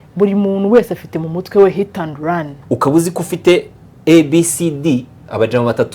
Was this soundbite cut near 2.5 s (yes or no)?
yes